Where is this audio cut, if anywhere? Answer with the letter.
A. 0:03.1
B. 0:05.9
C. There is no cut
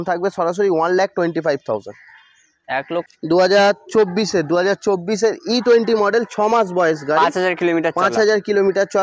A